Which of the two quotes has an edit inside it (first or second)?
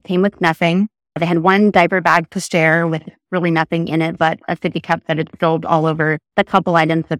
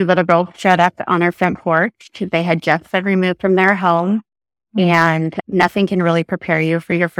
first